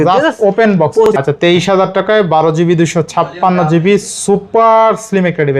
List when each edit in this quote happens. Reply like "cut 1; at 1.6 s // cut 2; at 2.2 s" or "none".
cut 1; at 1.1 s